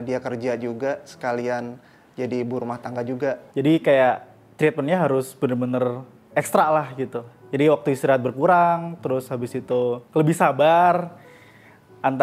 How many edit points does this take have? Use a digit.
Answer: 1